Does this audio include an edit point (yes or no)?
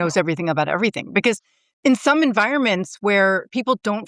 no